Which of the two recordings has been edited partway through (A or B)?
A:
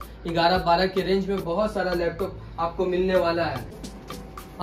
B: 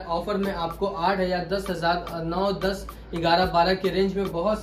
A